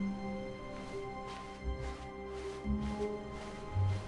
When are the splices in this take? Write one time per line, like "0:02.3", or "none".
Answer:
none

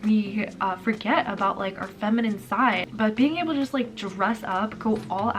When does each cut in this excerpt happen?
0:02.9

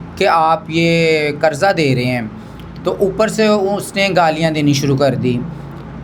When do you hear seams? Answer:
none

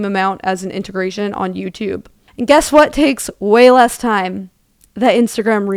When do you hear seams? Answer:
none

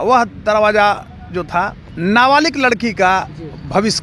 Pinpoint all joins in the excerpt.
0:01.8

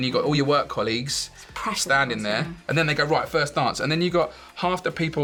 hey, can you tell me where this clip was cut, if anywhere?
none

